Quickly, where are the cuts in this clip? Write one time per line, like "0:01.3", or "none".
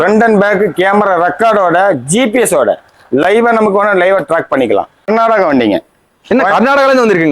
0:05.0